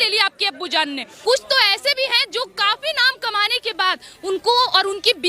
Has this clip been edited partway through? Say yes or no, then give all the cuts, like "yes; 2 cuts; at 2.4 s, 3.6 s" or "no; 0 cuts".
yes; 1 cut; at 1.2 s